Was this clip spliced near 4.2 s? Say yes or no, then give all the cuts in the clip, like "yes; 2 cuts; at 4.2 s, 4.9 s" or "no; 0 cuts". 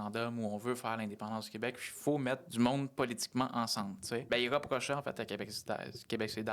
yes; 2 cuts; at 2.5 s, 4.2 s